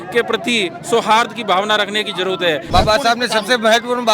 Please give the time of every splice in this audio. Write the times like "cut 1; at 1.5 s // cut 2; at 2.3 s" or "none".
cut 1; at 2.7 s

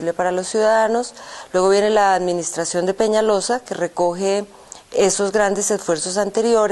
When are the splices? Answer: none

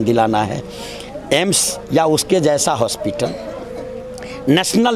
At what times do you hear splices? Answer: none

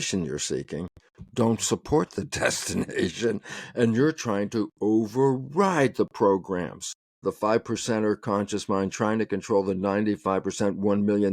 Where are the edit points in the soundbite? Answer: cut 1; at 7.2 s

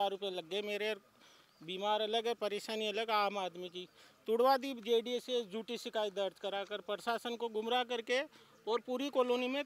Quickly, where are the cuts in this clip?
none

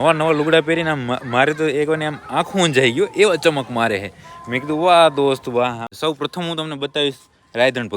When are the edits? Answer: cut 1; at 5.9 s

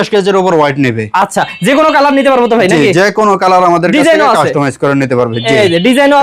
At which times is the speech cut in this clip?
none

